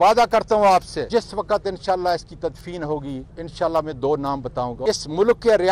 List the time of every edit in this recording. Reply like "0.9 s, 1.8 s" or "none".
1.1 s, 3.4 s, 4.8 s